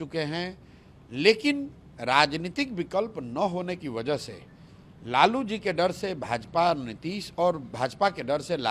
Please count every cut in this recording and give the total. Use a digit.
0